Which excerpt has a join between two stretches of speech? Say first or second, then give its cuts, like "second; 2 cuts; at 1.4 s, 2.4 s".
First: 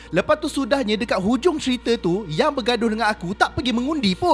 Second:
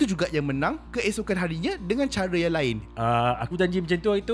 second; 1 cut; at 2.9 s